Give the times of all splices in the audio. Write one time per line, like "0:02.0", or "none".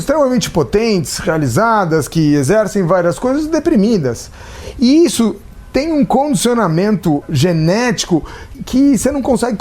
0:07.2
0:08.6